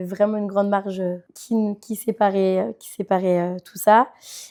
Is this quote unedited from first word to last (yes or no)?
yes